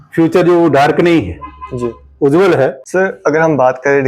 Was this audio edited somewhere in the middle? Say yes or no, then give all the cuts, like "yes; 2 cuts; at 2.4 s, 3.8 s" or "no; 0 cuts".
yes; 1 cut; at 2.8 s